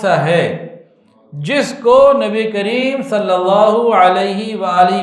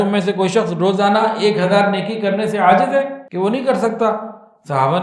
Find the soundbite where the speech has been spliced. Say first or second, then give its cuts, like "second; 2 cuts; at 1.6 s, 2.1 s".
second; 1 cut; at 3.2 s